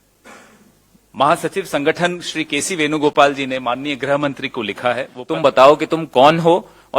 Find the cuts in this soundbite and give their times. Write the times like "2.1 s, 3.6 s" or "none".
5.1 s